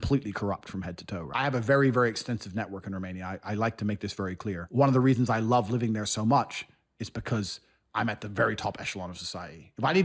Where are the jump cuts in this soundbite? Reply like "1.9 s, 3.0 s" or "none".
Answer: 1.2 s, 4.6 s